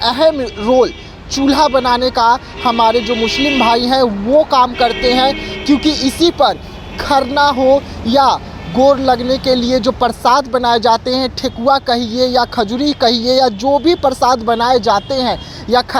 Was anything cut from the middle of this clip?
no; 0 cuts

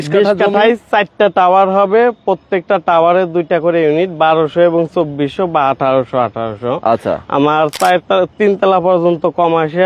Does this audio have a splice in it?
no; 0 cuts

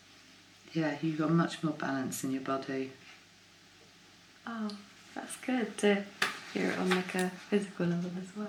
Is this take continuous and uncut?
yes; 0 cuts

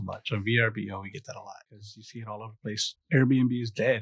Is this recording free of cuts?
no; 1 cut; at 2.3 s

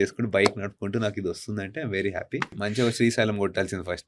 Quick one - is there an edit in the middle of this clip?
yes; 1 cut; at 2.6 s

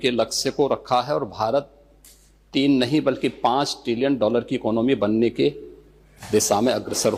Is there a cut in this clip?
no; 0 cuts

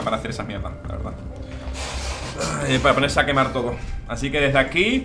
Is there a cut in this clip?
no; 0 cuts

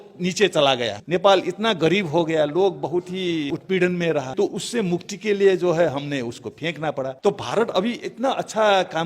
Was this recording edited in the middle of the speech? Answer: yes; 4 cuts; at 0.9 s, 3.5 s, 4.3 s, 7.1 s

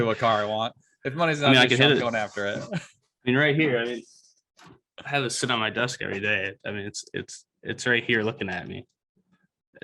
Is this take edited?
no; 0 cuts

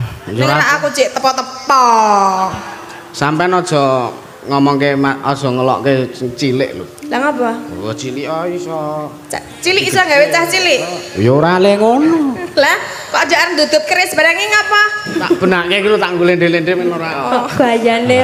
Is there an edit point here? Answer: no; 0 cuts

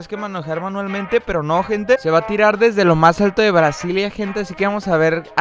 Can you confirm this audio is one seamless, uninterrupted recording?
no; 1 cut; at 2.0 s

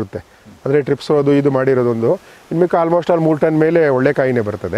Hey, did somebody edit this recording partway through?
no; 0 cuts

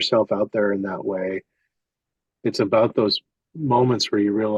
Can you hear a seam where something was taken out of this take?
no; 0 cuts

